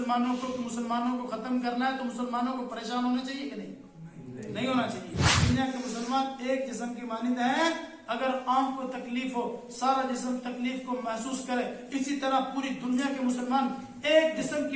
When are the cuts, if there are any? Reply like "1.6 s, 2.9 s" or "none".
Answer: 5.4 s